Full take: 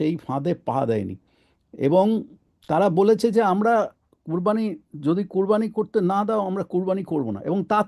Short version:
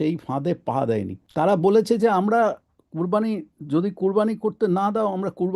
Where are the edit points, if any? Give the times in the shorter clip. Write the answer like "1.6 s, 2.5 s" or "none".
1.2 s